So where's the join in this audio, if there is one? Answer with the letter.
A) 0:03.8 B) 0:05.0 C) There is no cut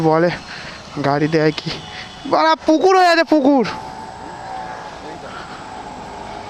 A